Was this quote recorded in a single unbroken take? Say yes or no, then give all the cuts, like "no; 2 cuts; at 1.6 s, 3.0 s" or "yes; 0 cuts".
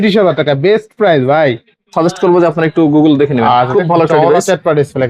no; 1 cut; at 1.7 s